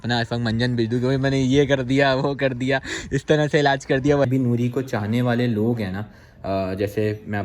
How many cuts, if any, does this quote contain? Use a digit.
1